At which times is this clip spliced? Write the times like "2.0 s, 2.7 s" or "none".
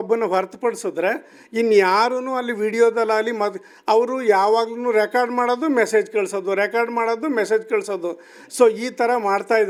none